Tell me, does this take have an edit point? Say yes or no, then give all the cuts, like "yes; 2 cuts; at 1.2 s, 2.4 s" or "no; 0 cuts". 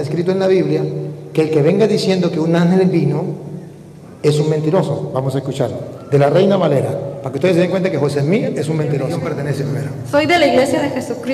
yes; 1 cut; at 9.3 s